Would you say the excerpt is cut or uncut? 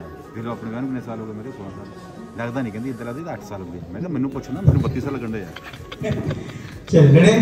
uncut